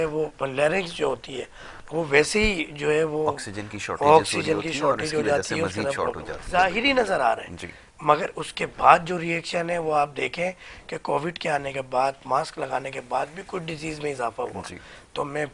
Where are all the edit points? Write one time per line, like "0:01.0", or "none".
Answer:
0:06.3